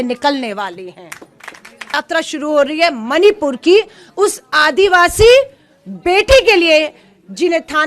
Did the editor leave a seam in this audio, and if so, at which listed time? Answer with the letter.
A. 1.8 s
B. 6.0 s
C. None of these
A